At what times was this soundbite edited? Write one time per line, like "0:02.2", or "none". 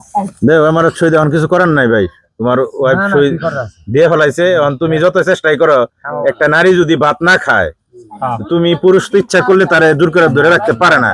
none

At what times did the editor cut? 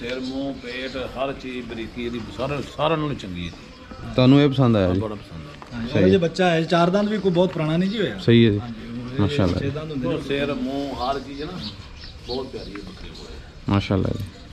none

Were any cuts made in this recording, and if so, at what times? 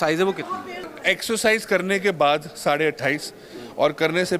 0:00.9

